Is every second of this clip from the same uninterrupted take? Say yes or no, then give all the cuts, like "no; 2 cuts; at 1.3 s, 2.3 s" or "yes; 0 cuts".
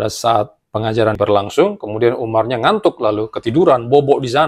no; 1 cut; at 1.2 s